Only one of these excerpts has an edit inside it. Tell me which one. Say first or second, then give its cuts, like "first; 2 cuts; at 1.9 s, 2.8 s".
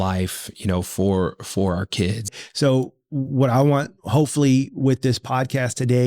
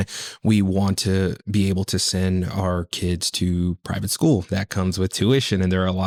first; 1 cut; at 2.3 s